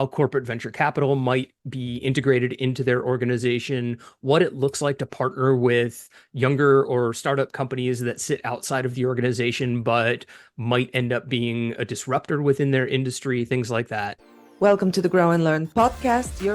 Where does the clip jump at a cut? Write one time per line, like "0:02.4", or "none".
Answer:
0:14.2